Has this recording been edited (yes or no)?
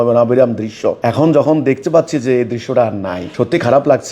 yes